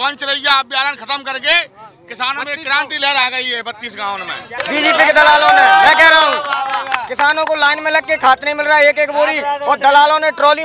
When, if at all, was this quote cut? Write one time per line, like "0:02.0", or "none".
0:04.6